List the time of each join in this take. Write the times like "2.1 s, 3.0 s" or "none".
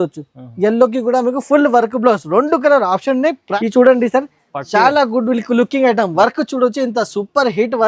3.4 s